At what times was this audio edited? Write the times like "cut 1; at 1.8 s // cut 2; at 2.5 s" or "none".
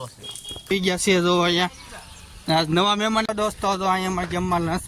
cut 1; at 0.7 s // cut 2; at 3.3 s